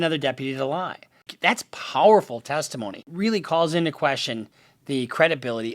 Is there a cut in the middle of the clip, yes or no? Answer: yes